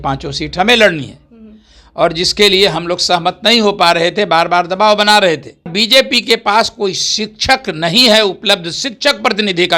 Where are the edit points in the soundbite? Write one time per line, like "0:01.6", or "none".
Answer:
0:05.7